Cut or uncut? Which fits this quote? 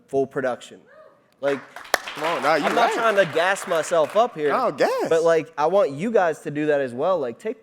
cut